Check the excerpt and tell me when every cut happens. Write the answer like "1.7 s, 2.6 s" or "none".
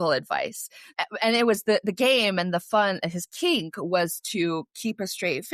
none